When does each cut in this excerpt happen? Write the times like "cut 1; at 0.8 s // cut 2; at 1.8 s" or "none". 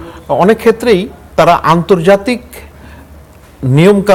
none